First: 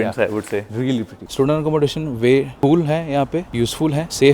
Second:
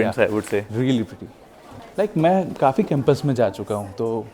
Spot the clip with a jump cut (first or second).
first